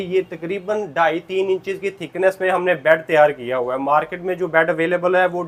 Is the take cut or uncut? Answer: uncut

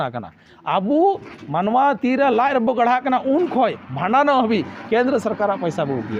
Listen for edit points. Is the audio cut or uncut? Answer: uncut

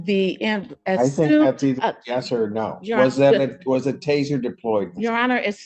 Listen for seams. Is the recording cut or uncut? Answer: uncut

